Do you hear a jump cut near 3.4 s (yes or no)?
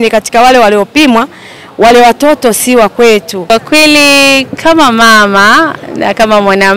yes